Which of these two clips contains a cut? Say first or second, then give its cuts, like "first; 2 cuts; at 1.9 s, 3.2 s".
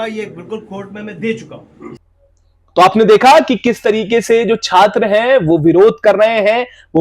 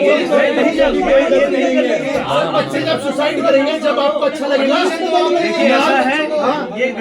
first; 1 cut; at 2.0 s